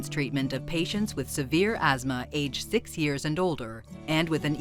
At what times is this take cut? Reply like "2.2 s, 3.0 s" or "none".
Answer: none

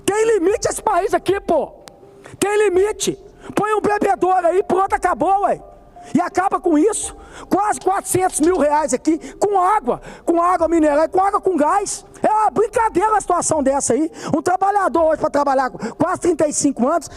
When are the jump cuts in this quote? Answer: 12.0 s

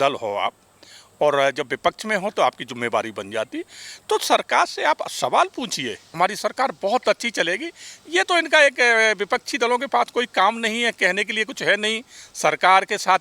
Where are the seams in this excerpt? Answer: 6.2 s

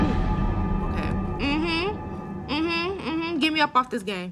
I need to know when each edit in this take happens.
none

